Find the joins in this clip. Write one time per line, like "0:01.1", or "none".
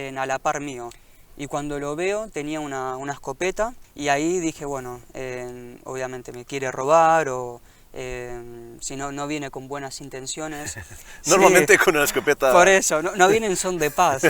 0:00.9
0:03.8